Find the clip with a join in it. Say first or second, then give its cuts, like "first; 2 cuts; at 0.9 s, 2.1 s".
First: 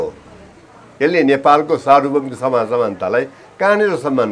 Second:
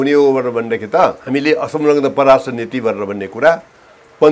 second; 1 cut; at 1.2 s